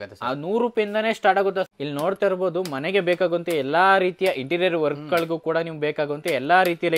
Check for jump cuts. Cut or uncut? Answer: cut